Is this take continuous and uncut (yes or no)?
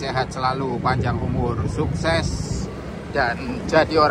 yes